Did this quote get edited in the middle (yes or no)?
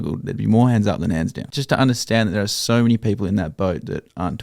yes